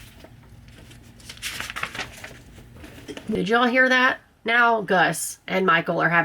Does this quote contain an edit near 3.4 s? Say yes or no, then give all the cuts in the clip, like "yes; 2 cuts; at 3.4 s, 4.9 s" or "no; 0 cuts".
yes; 1 cut; at 3.4 s